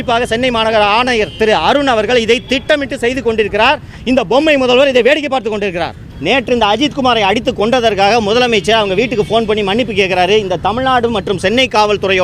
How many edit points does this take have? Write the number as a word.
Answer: one